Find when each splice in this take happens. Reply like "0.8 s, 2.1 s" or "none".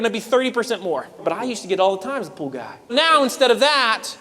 1.2 s, 2.9 s